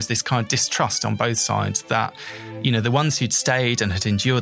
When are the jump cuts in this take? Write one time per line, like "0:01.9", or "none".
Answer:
none

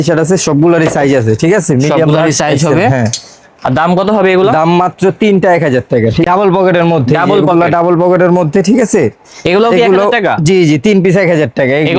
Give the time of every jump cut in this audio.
0:06.2

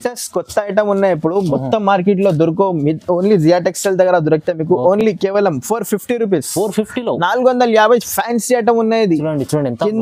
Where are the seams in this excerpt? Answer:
none

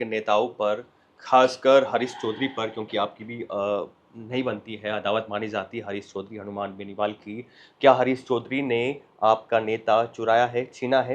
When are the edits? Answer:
none

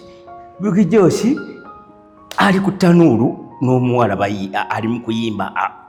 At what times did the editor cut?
none

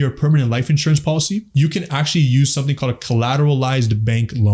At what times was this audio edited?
0:01.5

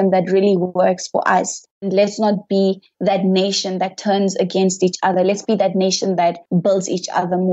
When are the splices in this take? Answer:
0:01.9
0:06.4

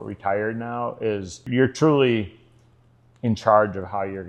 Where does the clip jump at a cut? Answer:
0:01.5

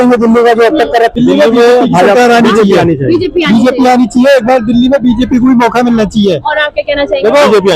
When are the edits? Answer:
0:01.1

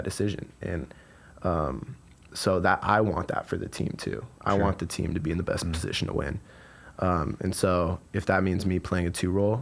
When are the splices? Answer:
none

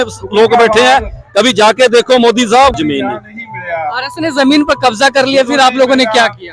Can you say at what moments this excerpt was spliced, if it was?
0:02.7

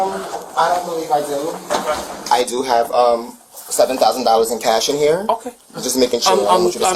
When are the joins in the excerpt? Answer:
0:02.1

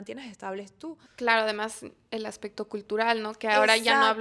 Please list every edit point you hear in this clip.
0:01.0

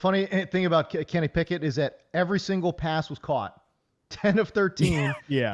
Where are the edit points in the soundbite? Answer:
none

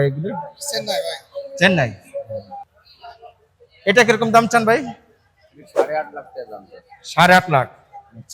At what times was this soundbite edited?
0:02.6

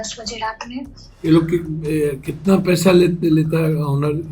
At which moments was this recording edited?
0:01.3

